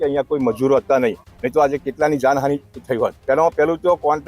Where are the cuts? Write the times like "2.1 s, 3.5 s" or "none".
3.2 s

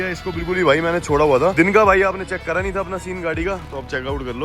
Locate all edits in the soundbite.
1.5 s

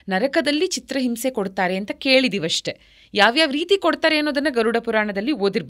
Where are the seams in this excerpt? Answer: none

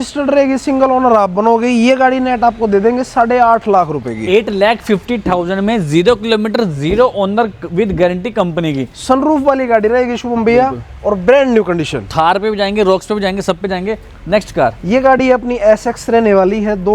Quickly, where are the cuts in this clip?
none

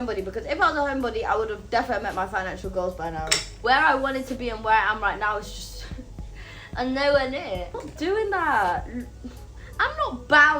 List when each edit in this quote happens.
3.5 s, 7.8 s

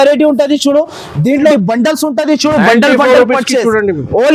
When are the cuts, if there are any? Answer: 1.5 s

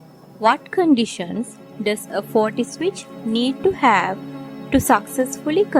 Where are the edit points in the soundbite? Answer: none

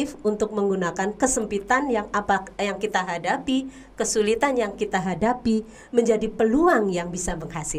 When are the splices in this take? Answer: none

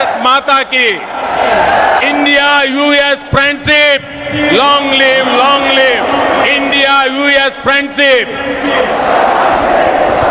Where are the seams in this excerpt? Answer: 2.0 s

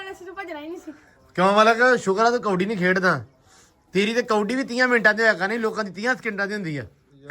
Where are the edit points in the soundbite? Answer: none

